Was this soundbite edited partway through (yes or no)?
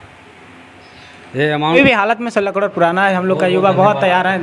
yes